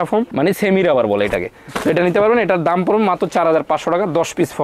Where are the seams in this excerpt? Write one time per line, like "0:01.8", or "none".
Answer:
none